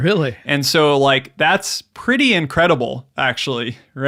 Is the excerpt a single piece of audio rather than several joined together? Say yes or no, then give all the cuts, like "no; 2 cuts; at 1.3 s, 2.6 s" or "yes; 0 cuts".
yes; 0 cuts